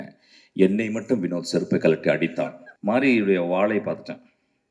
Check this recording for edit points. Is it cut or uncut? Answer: cut